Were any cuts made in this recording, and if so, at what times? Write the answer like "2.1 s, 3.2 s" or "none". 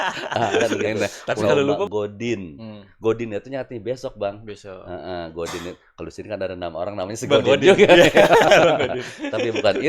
1.9 s

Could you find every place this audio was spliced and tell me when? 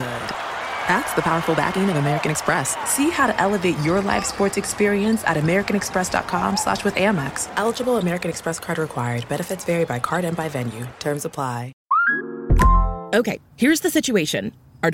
11.7 s

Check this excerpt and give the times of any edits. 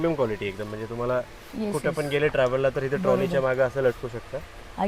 none

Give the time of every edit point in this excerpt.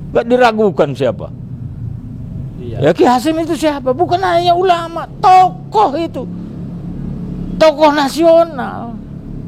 none

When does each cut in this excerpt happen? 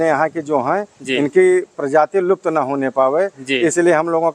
none

